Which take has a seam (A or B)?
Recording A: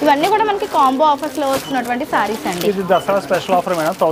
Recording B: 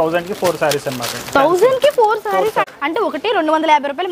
B